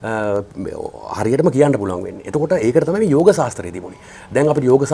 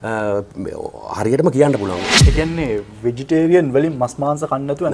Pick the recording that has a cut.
second; 1 cut; at 2.1 s

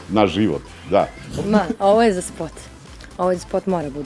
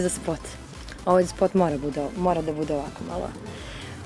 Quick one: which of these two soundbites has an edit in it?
first; 1 cut; at 1.2 s

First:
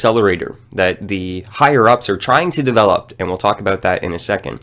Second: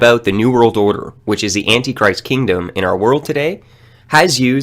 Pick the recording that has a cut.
first; 1 cut; at 1.4 s

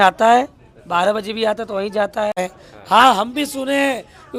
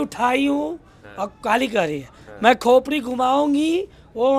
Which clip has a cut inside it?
first; 1 cut; at 2.4 s

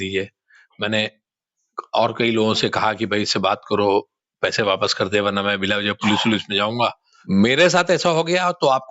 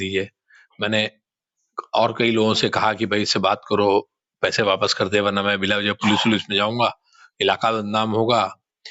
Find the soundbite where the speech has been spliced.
first; 1 cut; at 7.1 s

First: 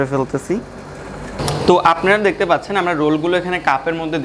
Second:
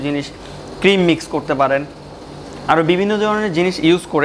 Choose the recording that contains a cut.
first; 1 cut; at 1.3 s

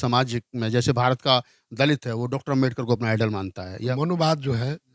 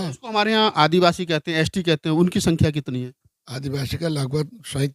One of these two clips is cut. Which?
first; 1 cut; at 3.8 s

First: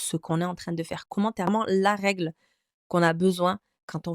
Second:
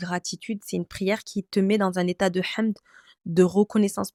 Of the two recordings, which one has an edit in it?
first; 1 cut; at 1.5 s

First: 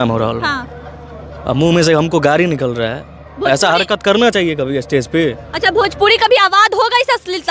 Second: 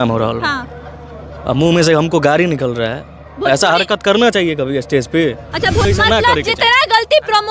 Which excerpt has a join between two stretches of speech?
second; 1 cut; at 5.9 s

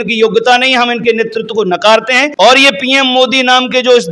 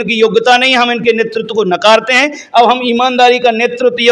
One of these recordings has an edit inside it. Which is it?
first; 1 cut; at 2.3 s

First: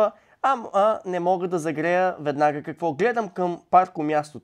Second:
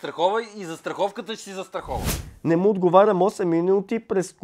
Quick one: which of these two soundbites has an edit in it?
second; 1 cut; at 2.2 s

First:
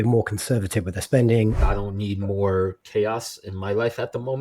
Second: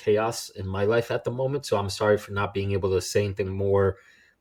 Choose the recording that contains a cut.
first; 1 cut; at 1.6 s

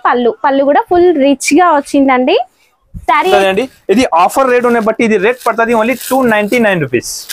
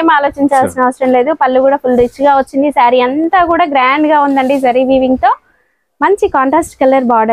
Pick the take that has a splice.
first; 1 cut; at 3.3 s

